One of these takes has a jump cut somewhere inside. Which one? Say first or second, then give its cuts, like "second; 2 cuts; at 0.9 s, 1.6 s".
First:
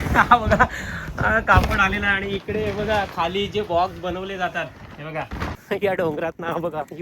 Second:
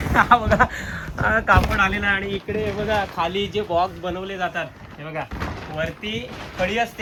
first; 1 cut; at 5.6 s